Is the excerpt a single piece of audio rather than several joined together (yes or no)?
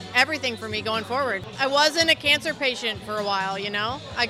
no